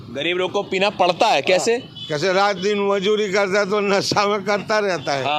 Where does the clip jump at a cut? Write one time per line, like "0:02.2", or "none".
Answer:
none